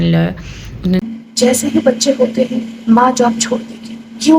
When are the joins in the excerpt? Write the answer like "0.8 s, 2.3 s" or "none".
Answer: 1.0 s